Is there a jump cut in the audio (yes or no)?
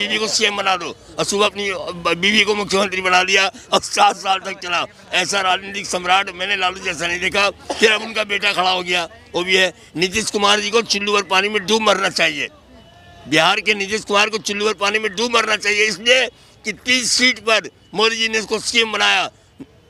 no